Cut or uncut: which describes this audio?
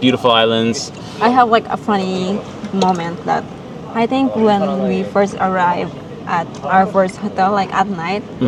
uncut